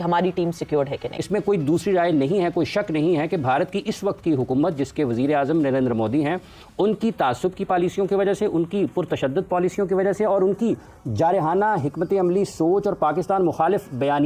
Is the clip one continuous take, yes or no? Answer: yes